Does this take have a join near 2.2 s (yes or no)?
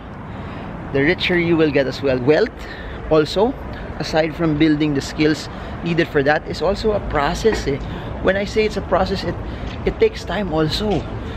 yes